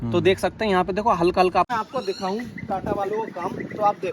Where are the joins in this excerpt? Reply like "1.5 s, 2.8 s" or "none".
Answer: 1.7 s